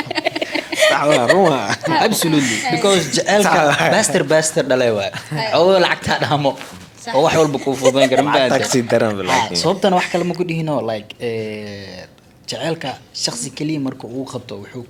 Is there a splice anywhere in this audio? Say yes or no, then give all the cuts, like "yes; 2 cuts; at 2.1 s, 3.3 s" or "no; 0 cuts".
no; 0 cuts